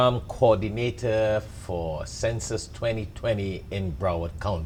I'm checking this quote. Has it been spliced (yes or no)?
no